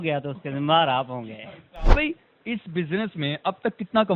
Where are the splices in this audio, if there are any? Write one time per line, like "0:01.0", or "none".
0:01.9